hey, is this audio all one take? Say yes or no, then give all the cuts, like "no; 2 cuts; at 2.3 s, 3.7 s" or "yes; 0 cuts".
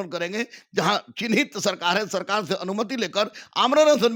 yes; 0 cuts